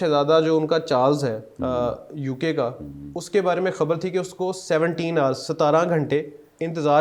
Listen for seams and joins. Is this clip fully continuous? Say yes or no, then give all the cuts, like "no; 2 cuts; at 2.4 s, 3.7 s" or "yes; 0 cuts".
yes; 0 cuts